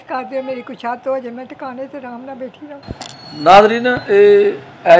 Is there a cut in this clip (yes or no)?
yes